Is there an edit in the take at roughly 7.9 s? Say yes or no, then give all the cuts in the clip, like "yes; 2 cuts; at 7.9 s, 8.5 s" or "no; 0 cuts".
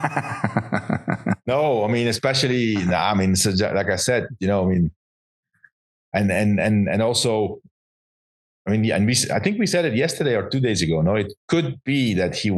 no; 0 cuts